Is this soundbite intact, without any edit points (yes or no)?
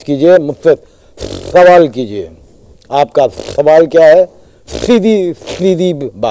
yes